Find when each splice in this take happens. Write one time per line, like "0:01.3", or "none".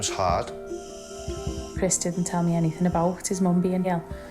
0:01.6